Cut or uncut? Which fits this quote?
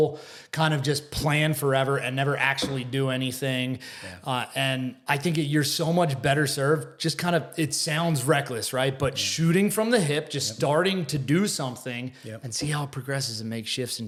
uncut